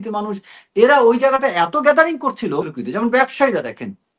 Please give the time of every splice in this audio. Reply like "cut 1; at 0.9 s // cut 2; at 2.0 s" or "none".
cut 1; at 2.8 s